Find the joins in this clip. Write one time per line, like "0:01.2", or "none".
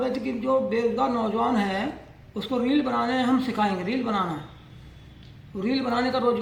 none